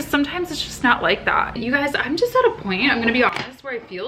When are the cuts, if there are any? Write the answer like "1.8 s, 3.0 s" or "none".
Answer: 1.6 s

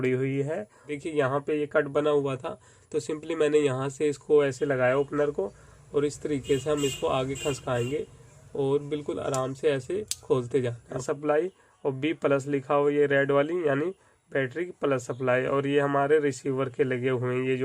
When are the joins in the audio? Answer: 0.9 s, 11.0 s

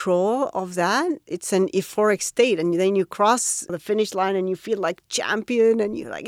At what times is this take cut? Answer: 1.3 s, 3.7 s

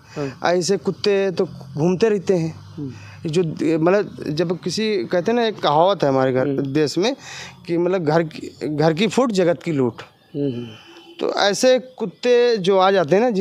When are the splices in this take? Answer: none

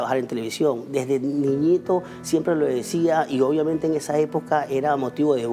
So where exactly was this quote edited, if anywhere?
none

